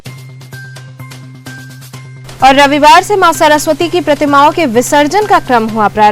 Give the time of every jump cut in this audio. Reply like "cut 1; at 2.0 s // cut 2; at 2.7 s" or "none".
none